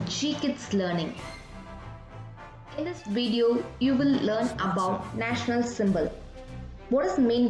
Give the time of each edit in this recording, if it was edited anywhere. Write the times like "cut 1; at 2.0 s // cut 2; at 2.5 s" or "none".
cut 1; at 1.2 s // cut 2; at 2.8 s